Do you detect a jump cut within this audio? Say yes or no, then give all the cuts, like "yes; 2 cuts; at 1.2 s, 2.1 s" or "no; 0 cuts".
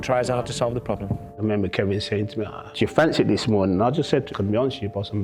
yes; 3 cuts; at 1.3 s, 2.7 s, 4.2 s